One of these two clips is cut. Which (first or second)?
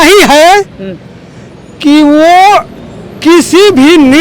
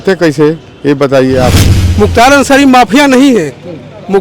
second